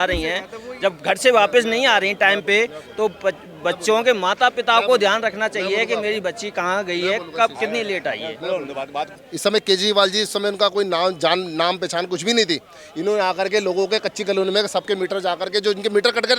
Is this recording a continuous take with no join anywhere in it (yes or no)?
no